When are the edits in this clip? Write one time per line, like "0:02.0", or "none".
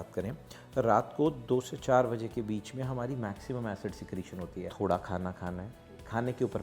0:04.6